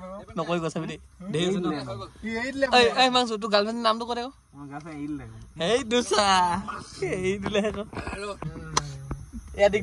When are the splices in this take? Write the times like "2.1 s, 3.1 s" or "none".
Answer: none